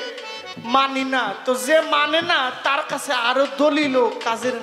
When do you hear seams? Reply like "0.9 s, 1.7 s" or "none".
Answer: none